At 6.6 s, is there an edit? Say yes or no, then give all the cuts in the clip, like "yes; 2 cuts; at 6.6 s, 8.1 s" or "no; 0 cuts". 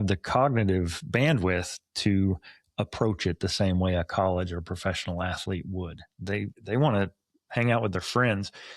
yes; 1 cut; at 6.6 s